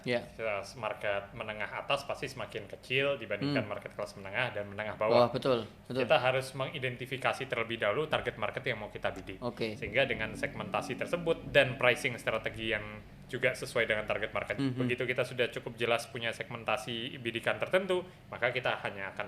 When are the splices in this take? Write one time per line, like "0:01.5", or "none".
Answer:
0:09.8
0:14.5